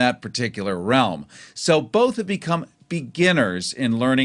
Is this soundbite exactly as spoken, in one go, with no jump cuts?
no; 1 cut; at 2.4 s

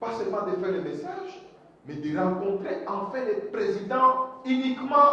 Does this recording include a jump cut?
no; 0 cuts

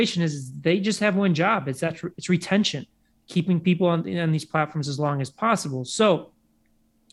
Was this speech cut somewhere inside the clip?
no; 0 cuts

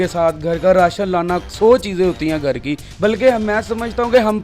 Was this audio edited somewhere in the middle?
no; 0 cuts

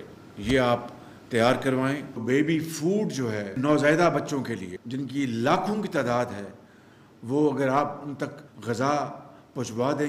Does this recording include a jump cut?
yes; 1 cut; at 2.2 s

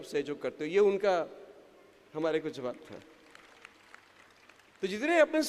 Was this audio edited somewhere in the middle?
no; 0 cuts

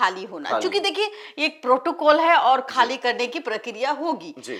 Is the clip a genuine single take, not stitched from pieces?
yes; 0 cuts

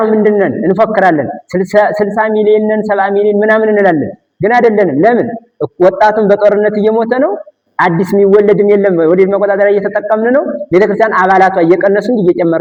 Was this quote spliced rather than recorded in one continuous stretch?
no; 0 cuts

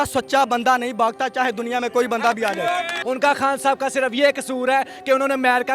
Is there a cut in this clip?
yes; 1 cut; at 2.9 s

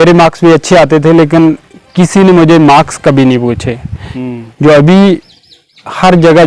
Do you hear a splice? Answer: no; 0 cuts

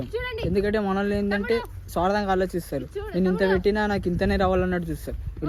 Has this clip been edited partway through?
no; 0 cuts

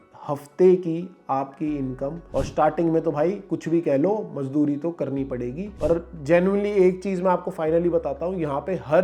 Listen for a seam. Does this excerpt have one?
yes; 2 cuts; at 2.3 s, 5.7 s

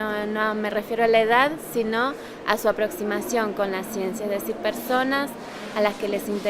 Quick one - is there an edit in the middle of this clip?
yes; 1 cut; at 2.8 s

